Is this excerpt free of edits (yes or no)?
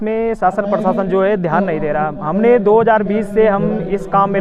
yes